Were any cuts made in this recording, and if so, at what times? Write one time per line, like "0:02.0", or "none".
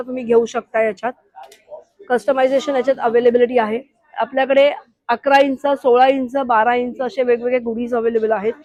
none

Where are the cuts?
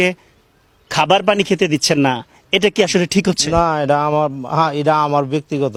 none

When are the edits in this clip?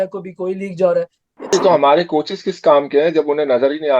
0:01.5

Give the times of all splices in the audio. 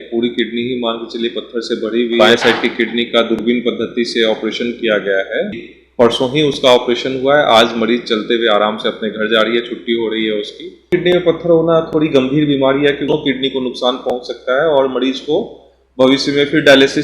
0:02.2
0:05.7
0:10.9
0:13.1

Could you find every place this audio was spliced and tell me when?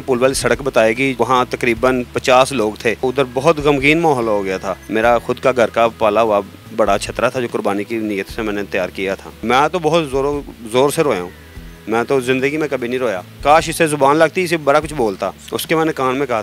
0:03.0
0:04.8
0:09.3
0:13.3
0:15.5

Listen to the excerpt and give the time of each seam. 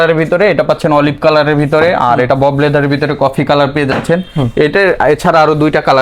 none

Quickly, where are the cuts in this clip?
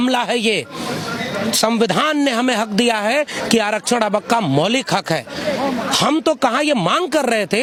none

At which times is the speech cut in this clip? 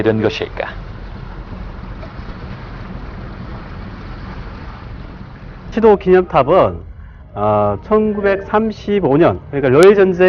0:01.2

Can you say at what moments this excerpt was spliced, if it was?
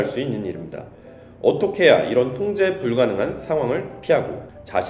0:01.2

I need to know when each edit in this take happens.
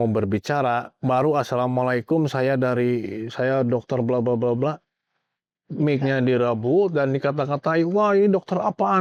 none

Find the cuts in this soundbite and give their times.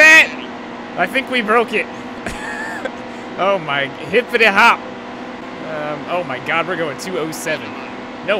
0:05.4

